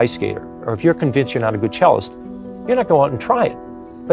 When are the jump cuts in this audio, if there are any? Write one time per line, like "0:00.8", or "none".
none